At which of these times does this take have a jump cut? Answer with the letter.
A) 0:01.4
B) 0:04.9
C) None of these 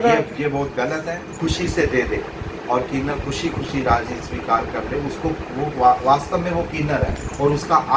A